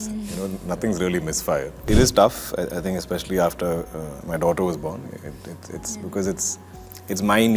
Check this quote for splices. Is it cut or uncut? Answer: cut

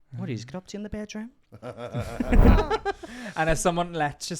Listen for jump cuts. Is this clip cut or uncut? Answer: cut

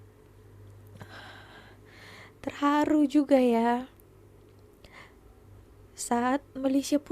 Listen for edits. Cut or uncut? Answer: uncut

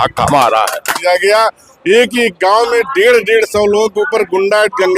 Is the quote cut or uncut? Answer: cut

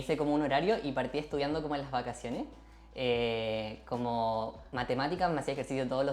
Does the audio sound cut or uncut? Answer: uncut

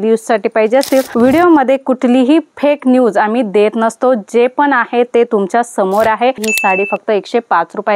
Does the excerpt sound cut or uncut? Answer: cut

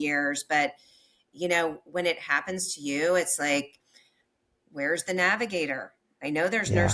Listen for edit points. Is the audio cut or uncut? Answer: uncut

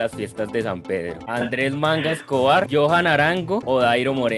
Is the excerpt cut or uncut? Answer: cut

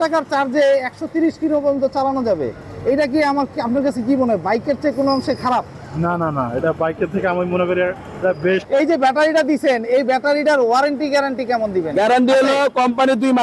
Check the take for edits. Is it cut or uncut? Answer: cut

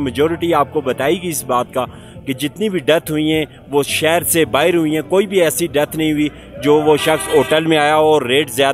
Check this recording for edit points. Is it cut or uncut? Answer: uncut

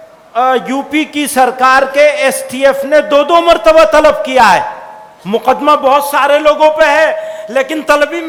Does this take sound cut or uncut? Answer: uncut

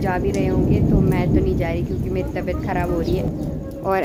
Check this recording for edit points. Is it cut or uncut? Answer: uncut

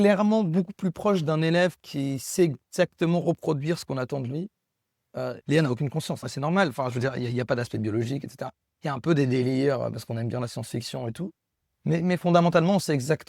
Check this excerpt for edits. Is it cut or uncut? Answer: cut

